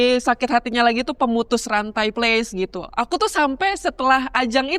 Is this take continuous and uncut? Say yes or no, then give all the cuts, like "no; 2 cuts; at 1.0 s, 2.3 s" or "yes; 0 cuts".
no; 1 cut; at 2.1 s